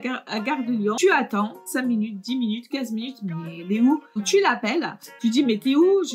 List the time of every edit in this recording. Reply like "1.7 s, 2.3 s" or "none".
1.0 s, 1.6 s, 4.2 s